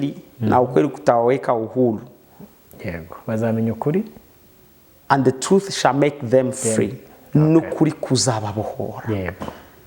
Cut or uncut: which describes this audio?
uncut